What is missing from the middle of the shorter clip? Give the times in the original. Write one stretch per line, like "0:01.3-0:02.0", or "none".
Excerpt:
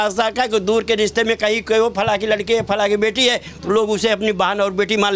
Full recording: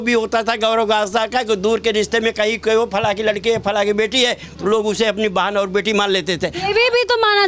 none